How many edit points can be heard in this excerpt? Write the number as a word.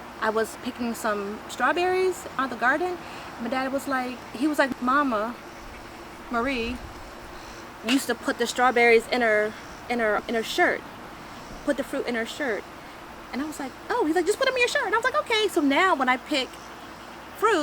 one